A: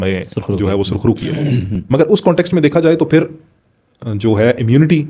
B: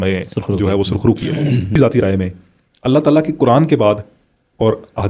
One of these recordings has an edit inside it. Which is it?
B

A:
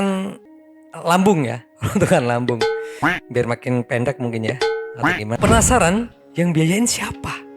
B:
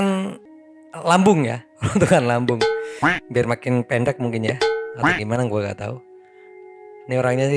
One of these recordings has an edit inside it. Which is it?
A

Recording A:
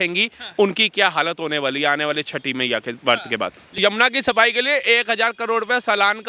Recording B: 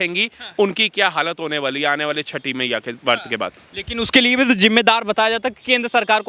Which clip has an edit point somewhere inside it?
A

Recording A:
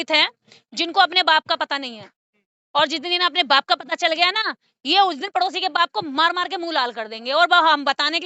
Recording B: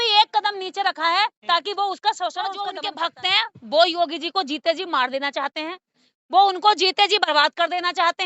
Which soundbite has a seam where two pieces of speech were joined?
B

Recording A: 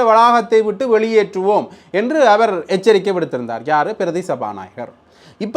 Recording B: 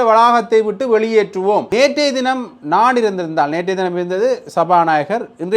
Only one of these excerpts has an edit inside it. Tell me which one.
B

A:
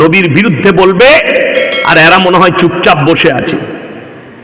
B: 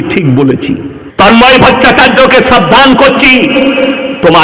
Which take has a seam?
B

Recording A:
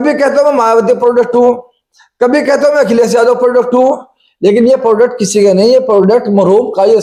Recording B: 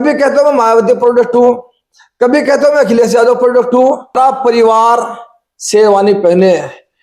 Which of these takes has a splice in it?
B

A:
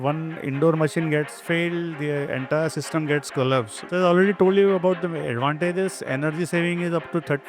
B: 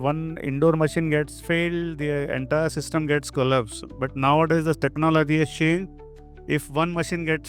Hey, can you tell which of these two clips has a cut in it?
A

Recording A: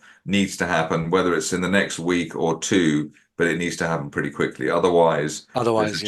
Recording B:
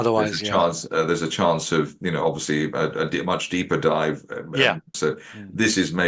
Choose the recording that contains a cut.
B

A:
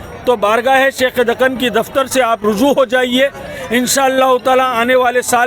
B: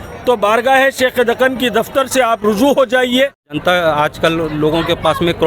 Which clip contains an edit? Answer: B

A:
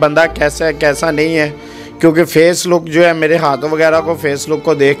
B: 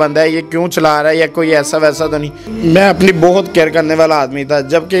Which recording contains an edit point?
B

